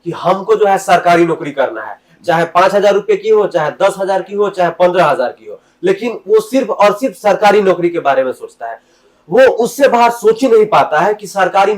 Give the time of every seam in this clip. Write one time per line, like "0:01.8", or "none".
none

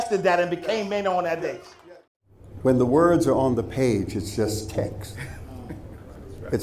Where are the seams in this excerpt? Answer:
0:01.7

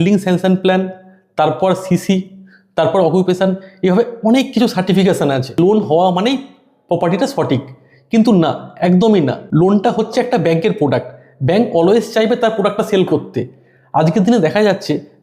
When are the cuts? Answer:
0:05.6
0:09.4

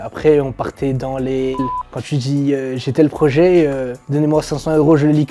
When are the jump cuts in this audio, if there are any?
0:01.6

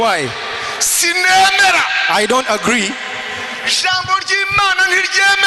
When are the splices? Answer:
none

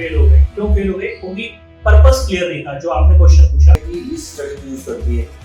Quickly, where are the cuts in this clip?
0:03.8

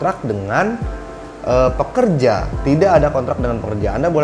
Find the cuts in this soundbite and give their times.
none

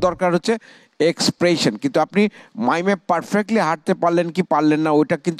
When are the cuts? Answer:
none

